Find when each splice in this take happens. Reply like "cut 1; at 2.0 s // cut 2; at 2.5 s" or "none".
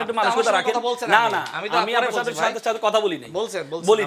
none